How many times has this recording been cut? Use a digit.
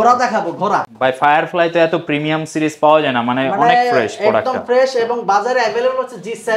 1